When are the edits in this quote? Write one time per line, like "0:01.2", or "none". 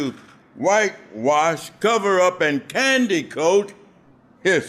none

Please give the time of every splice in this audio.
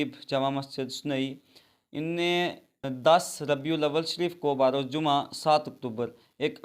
0:02.9

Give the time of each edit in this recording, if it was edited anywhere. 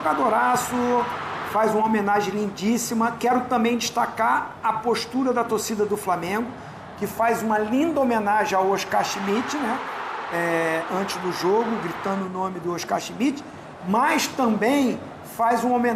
none

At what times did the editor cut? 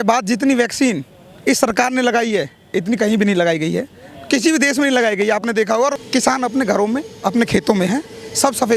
0:06.0

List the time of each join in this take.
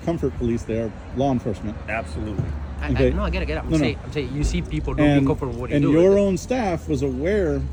none

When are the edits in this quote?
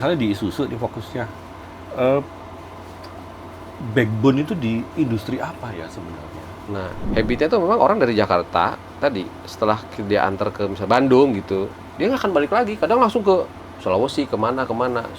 0:07.0

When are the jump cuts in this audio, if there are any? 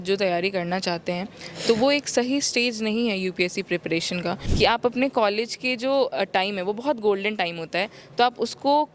0:04.5

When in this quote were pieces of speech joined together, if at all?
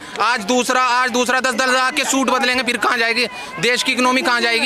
none

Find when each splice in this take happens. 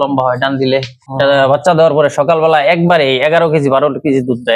none

